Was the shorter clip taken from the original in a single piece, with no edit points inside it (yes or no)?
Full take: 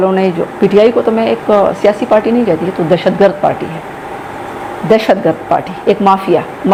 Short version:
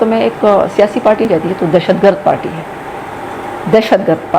no